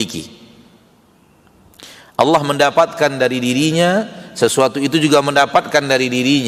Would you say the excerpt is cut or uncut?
uncut